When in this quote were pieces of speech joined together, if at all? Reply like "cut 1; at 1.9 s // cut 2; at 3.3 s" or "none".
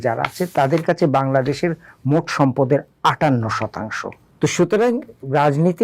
cut 1; at 4.2 s